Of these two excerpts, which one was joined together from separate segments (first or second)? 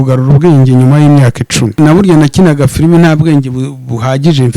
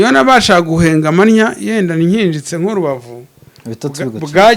first